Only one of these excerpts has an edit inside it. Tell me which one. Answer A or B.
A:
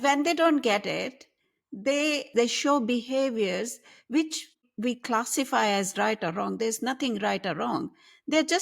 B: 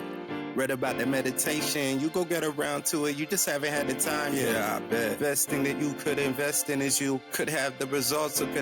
A